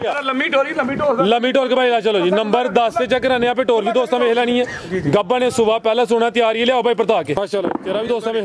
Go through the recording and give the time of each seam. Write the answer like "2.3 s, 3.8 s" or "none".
7.4 s